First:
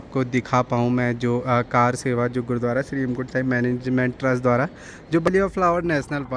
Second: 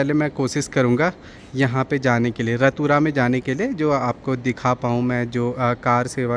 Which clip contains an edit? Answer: first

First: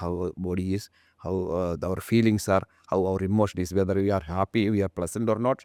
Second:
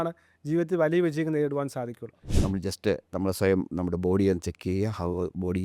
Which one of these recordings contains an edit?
second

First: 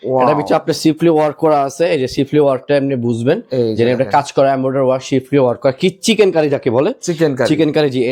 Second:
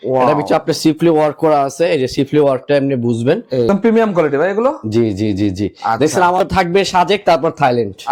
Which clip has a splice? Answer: second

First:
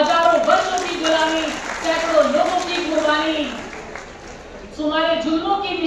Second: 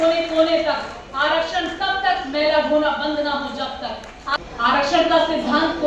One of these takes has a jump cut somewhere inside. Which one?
second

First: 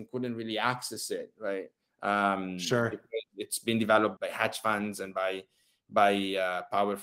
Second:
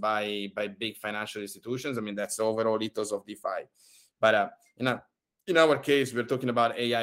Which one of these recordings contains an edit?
first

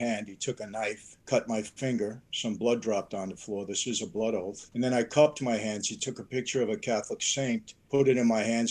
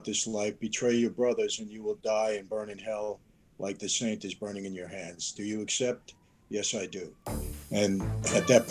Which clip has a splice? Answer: first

